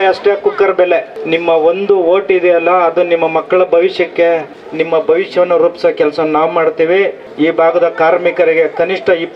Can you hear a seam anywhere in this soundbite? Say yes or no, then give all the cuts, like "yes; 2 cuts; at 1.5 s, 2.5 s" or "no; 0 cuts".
yes; 3 cuts; at 1.1 s, 4.6 s, 7.2 s